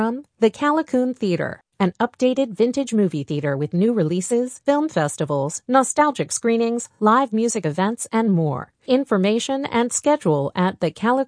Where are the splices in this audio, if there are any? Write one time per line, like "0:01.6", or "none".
none